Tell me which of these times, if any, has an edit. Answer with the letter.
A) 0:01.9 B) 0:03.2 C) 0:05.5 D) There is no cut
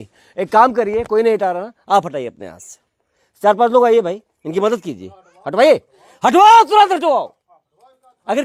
D